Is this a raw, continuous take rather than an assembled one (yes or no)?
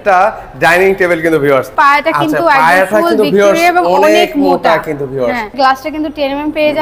no